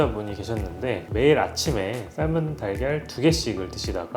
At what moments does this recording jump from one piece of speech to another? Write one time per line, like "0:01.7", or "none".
0:01.0